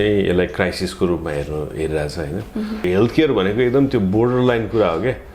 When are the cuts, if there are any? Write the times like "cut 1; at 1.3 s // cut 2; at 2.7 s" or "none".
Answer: cut 1; at 2.8 s